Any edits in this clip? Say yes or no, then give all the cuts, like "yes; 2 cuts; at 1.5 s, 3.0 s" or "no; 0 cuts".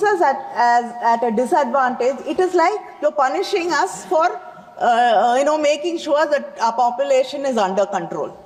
no; 0 cuts